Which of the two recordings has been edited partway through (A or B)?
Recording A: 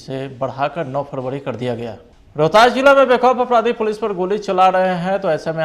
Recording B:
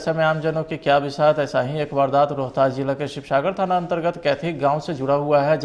A